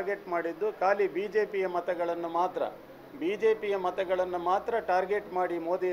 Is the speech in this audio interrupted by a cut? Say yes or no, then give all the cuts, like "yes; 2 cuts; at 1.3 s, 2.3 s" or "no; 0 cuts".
no; 0 cuts